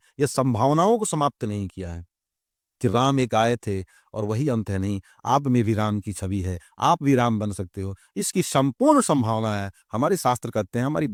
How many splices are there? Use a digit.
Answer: 0